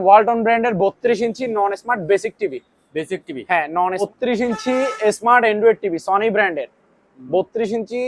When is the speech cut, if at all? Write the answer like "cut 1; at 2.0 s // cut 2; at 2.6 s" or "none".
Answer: cut 1; at 4.1 s